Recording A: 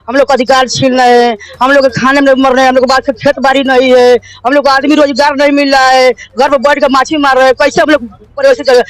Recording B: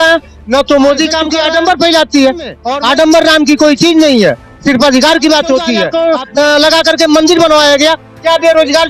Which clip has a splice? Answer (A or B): B